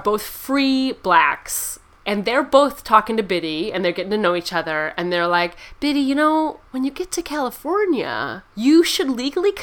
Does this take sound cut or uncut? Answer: uncut